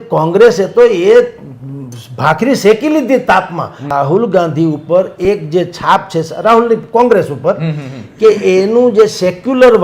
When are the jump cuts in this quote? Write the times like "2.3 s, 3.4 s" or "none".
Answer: 3.9 s